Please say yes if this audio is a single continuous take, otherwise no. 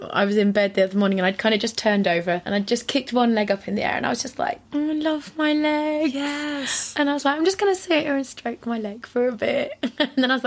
no